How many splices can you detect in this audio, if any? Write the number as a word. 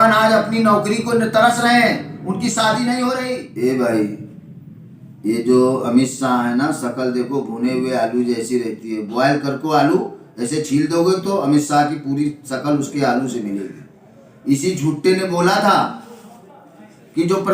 one